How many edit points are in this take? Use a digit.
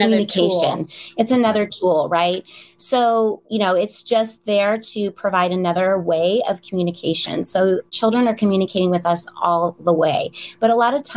0